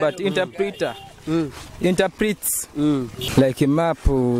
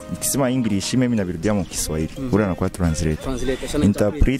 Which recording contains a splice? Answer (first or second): first